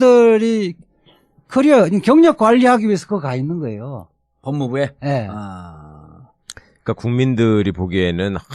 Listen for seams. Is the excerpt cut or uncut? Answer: uncut